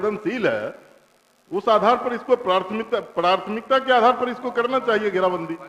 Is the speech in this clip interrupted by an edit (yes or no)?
no